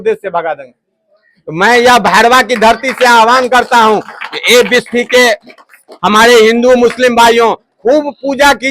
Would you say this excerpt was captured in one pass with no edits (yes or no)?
yes